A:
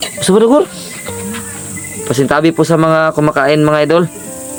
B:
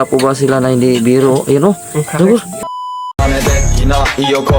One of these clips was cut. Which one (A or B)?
B